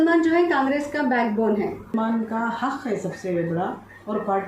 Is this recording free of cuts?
no; 1 cut; at 1.9 s

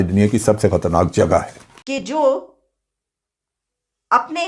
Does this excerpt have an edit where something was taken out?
yes; 1 cut; at 2.0 s

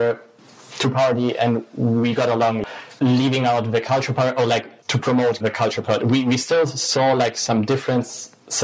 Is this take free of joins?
no; 1 cut; at 2.7 s

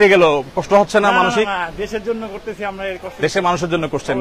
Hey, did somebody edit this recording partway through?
no; 0 cuts

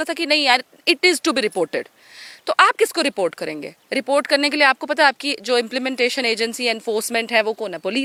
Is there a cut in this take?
no; 0 cuts

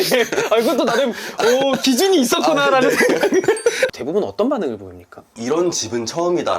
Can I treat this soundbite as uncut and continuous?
no; 1 cut; at 3.9 s

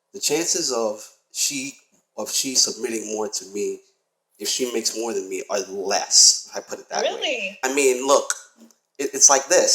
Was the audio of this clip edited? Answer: yes; 1 cut; at 7.7 s

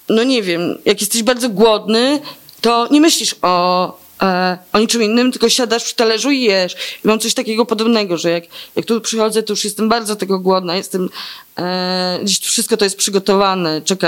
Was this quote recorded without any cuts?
yes; 0 cuts

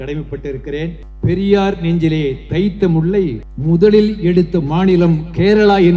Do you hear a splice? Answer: yes; 2 cuts; at 1.0 s, 3.5 s

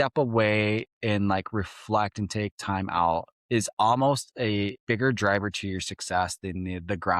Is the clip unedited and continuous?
no; 2 cuts; at 3.3 s, 4.8 s

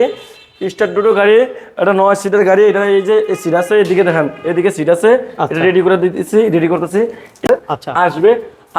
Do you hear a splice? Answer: yes; 1 cut; at 7.4 s

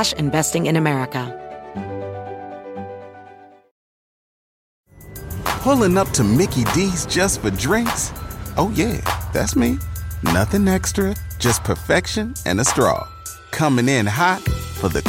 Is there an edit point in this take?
yes; 1 cut; at 1.3 s

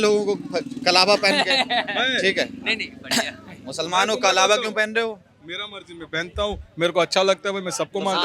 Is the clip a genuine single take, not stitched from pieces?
yes; 0 cuts

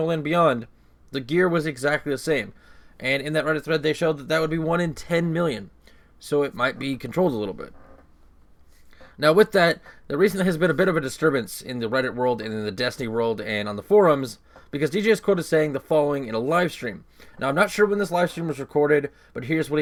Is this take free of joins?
yes; 0 cuts

